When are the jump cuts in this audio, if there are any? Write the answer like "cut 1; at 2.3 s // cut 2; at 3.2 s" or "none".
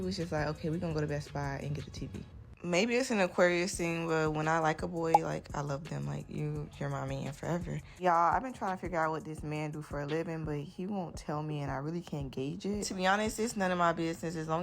cut 1; at 7.6 s // cut 2; at 10.7 s